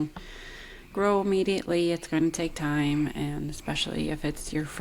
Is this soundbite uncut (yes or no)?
yes